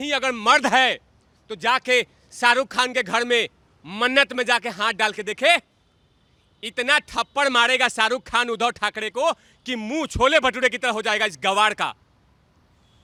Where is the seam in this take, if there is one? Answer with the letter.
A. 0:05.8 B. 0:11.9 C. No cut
C